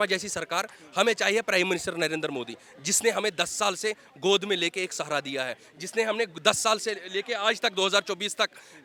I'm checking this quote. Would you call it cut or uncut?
uncut